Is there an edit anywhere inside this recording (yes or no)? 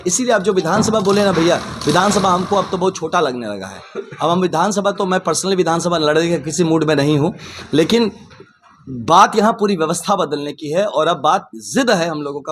no